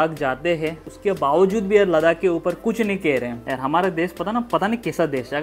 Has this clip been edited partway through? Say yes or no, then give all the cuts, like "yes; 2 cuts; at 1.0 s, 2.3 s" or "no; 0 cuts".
yes; 2 cuts; at 0.9 s, 3.4 s